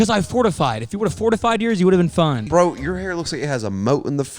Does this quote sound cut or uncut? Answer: cut